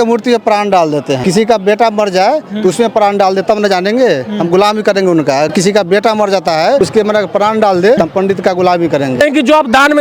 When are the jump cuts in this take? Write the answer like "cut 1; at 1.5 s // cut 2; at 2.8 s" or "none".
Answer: cut 1; at 1.2 s // cut 2; at 5.5 s // cut 3; at 6.8 s // cut 4; at 8.0 s // cut 5; at 9.2 s